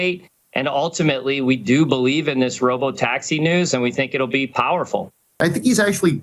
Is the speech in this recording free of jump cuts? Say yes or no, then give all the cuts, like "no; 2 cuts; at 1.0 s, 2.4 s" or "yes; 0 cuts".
no; 1 cut; at 5.2 s